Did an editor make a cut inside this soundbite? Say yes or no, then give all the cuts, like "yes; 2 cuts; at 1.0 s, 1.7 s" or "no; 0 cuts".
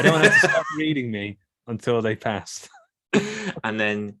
no; 0 cuts